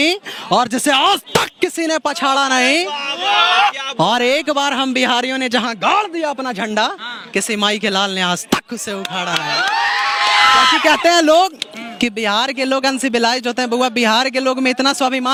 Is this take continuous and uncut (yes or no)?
yes